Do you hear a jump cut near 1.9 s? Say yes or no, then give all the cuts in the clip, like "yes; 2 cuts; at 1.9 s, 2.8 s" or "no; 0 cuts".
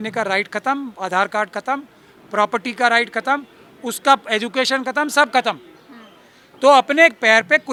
no; 0 cuts